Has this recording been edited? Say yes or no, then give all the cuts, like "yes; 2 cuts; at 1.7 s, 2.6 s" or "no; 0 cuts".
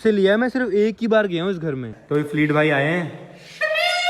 yes; 1 cut; at 1.9 s